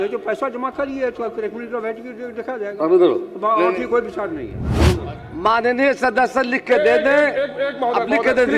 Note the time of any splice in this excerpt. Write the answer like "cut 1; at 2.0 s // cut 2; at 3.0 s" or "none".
cut 1; at 4.8 s